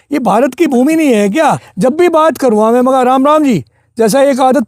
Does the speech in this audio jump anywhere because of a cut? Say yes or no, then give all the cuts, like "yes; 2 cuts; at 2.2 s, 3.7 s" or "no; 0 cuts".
yes; 1 cut; at 1.7 s